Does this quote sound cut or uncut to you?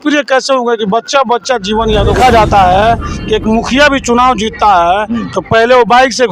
cut